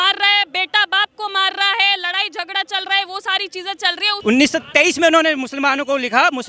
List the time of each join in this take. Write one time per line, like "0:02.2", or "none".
0:04.1